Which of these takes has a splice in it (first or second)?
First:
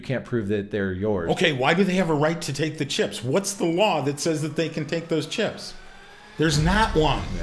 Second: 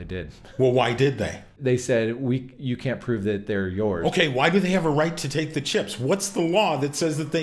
second